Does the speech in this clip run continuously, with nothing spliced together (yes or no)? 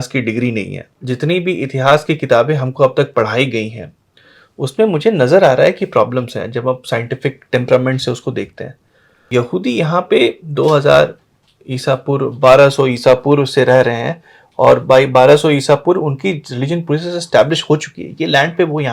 no